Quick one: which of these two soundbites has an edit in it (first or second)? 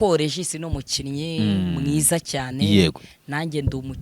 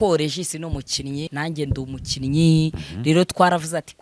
second